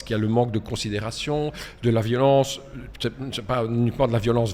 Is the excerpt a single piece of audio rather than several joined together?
yes; 0 cuts

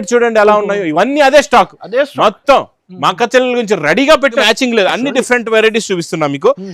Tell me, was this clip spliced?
yes; 1 cut; at 4.4 s

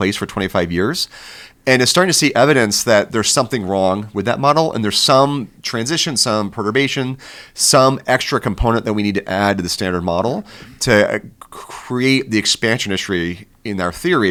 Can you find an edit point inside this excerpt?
no; 0 cuts

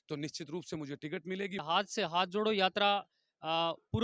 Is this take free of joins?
no; 1 cut; at 1.6 s

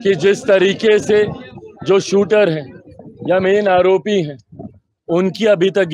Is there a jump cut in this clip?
no; 0 cuts

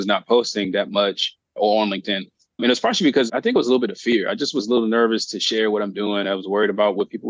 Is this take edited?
no; 0 cuts

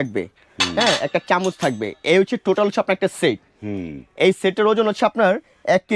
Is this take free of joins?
yes; 0 cuts

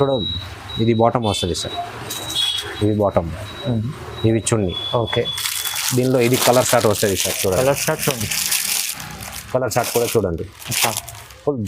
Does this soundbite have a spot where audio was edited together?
no; 0 cuts

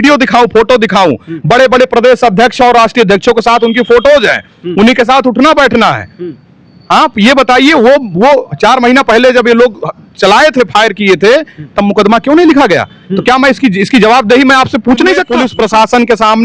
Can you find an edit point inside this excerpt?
yes; 1 cut; at 15.4 s

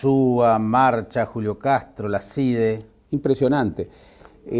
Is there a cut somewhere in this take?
yes; 1 cut; at 2.2 s

